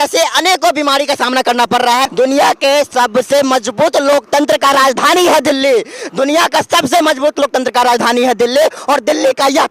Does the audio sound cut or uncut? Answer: cut